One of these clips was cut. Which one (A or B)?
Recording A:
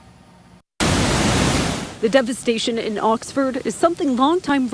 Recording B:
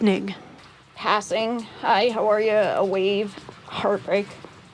A